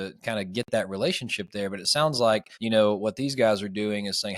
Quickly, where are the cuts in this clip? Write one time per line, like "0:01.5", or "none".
0:02.5